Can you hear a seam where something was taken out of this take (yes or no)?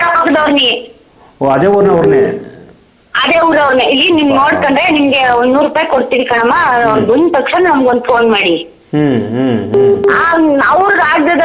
no